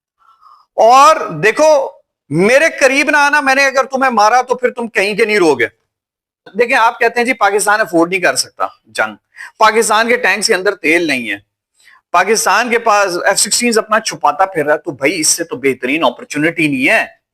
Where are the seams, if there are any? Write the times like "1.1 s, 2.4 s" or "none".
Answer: 6.5 s